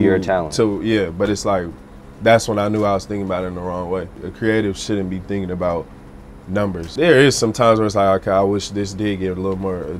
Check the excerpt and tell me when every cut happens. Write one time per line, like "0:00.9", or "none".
0:04.2
0:06.8